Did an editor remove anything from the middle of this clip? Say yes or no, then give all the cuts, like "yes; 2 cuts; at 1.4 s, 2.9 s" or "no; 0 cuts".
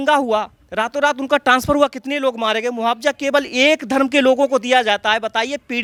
no; 0 cuts